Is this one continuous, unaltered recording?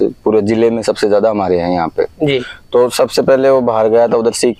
yes; 0 cuts

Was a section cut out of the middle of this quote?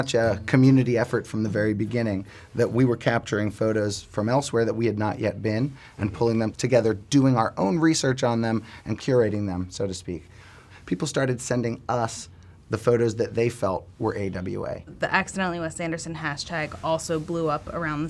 yes; 4 cuts; at 6.5 s, 9.0 s, 10.5 s, 14.9 s

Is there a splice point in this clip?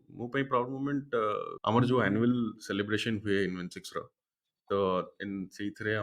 yes; 1 cut; at 1.5 s

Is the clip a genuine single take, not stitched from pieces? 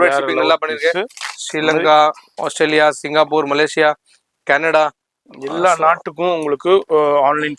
yes; 0 cuts

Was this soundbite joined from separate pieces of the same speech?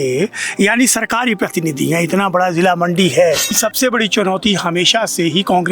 yes; 1 cut; at 3.6 s

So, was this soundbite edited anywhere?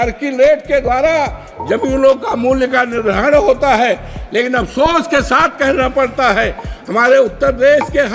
no; 0 cuts

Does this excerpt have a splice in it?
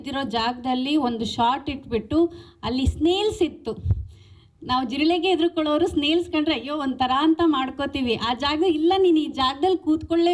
no; 0 cuts

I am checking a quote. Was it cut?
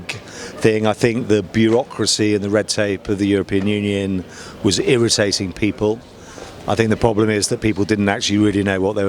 no; 0 cuts

